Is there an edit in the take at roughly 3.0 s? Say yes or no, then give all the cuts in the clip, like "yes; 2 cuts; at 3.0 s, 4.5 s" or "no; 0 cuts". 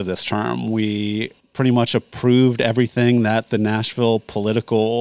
no; 1 cut; at 1.4 s